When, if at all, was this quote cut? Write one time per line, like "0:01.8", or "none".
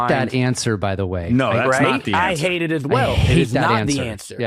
none